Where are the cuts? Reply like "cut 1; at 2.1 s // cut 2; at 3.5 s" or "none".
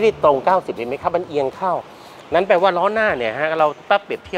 none